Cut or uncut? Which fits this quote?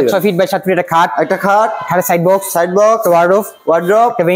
uncut